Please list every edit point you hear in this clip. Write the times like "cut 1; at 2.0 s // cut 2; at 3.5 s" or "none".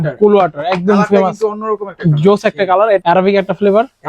cut 1; at 3.0 s